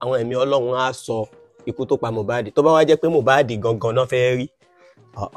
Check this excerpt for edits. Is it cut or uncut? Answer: uncut